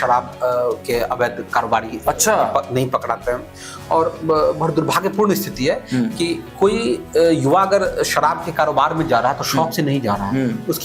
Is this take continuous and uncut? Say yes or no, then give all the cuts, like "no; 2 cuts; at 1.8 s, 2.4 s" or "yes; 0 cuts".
yes; 0 cuts